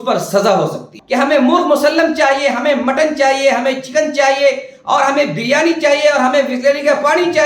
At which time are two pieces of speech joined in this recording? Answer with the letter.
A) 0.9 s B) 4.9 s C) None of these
A